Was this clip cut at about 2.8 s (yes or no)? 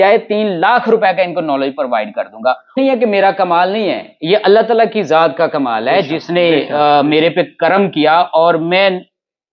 yes